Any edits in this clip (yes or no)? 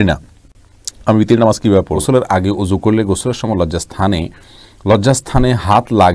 yes